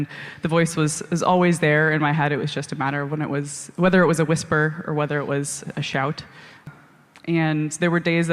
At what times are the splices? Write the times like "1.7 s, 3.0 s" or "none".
6.7 s